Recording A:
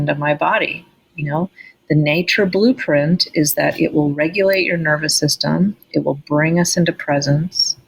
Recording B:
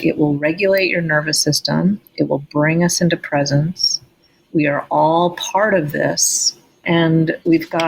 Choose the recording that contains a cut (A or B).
B